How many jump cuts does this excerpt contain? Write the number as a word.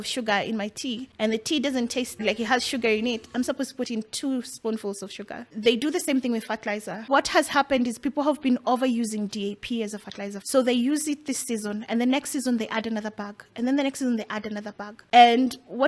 six